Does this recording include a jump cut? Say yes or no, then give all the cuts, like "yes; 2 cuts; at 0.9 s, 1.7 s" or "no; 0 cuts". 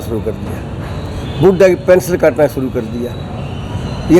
no; 0 cuts